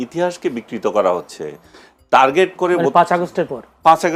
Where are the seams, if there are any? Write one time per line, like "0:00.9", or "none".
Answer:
none